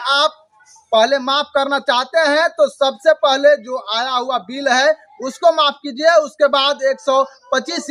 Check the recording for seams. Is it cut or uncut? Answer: uncut